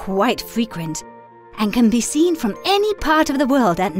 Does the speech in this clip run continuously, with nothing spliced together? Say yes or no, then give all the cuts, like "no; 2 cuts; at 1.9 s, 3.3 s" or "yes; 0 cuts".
yes; 0 cuts